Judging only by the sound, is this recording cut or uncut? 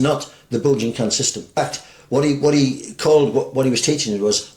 cut